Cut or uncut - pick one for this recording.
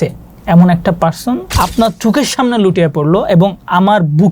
cut